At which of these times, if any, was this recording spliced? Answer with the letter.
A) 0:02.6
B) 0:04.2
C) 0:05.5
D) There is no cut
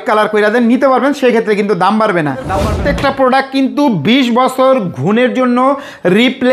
A